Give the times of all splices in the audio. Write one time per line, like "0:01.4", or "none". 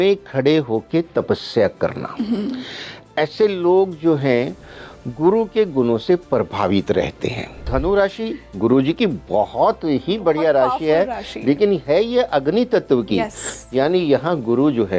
0:07.6